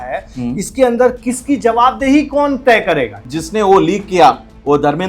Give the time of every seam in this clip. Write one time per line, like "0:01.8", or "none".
0:03.2